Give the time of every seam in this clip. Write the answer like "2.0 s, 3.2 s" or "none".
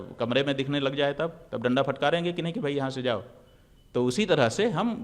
none